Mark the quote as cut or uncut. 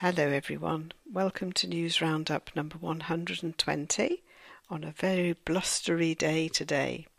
uncut